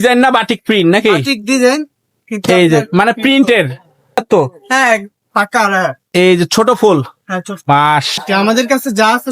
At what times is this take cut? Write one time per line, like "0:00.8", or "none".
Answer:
0:04.2
0:08.2